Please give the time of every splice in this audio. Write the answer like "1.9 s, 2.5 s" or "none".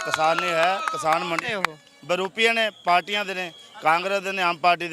none